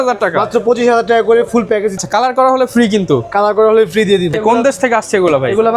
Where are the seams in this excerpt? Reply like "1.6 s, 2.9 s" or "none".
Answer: 2.0 s, 4.3 s

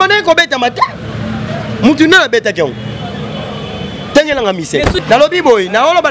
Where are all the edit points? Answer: 5.0 s

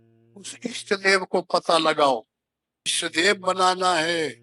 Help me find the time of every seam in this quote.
3.0 s

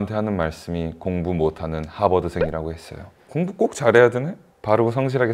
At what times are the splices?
3.2 s

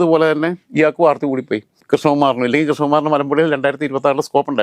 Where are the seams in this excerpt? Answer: none

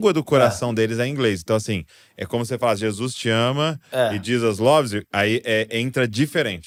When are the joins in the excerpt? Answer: none

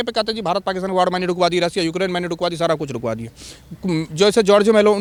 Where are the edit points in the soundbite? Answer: none

